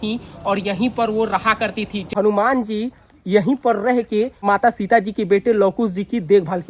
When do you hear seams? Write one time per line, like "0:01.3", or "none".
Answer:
0:02.0
0:04.4